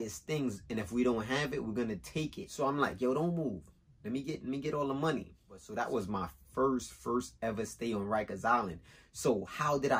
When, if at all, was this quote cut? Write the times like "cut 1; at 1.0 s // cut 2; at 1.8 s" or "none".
cut 1; at 2.4 s // cut 2; at 5.7 s